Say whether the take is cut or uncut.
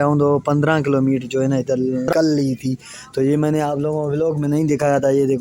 cut